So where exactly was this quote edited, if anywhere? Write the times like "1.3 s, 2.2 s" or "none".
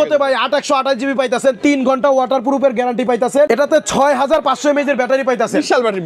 3.5 s